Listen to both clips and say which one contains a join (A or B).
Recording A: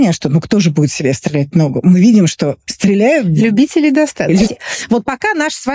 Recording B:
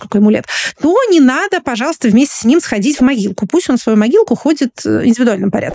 A